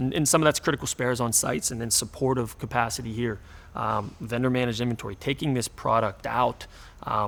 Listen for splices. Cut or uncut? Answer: uncut